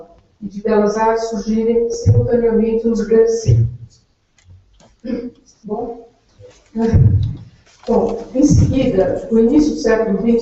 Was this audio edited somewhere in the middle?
no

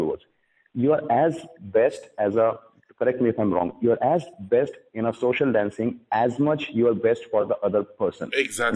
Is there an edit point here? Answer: no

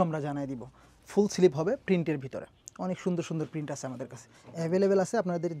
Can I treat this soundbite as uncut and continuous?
no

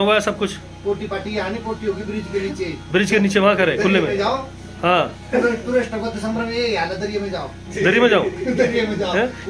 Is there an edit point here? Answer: no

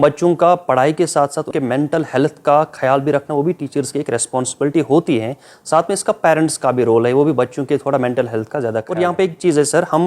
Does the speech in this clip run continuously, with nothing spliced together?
no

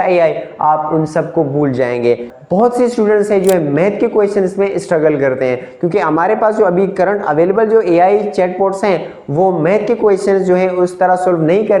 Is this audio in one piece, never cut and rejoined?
no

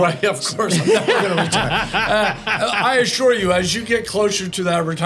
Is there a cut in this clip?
no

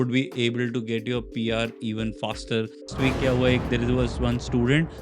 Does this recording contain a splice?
yes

